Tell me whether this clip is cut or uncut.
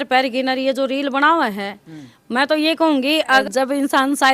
cut